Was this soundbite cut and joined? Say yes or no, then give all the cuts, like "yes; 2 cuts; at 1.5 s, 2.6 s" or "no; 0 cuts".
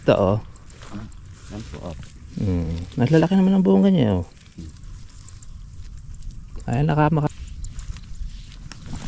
yes; 1 cut; at 7.3 s